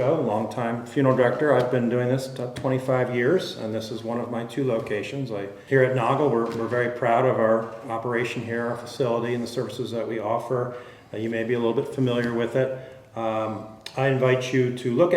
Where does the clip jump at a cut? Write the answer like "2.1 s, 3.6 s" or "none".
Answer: 5.5 s